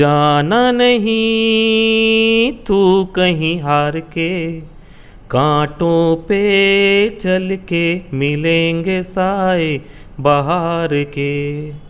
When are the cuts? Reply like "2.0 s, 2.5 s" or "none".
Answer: none